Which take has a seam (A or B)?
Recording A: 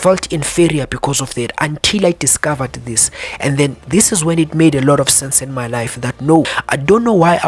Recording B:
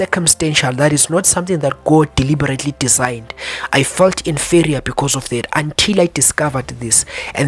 A